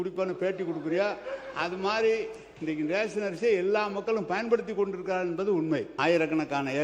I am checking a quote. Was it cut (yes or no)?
yes